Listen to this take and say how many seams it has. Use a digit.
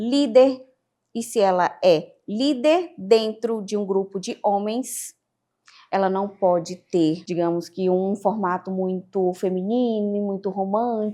1